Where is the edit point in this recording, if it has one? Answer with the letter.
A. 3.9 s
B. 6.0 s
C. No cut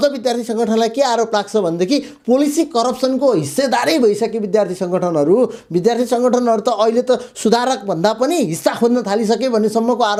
C